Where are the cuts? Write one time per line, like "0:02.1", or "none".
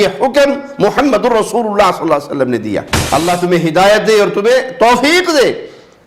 0:02.9